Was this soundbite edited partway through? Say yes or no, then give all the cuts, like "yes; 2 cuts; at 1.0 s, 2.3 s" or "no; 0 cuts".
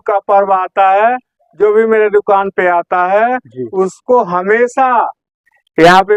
no; 0 cuts